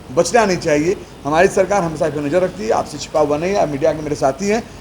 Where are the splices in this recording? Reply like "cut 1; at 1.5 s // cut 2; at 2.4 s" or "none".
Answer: none